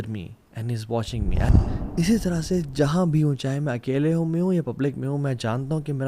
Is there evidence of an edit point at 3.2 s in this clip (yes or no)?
no